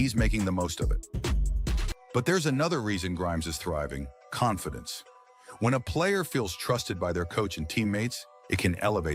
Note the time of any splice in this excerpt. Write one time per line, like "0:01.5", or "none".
none